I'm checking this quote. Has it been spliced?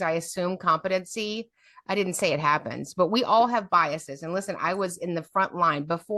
no; 0 cuts

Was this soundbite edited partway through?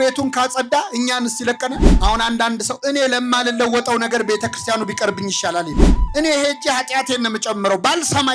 yes; 2 cuts; at 1.9 s, 5.9 s

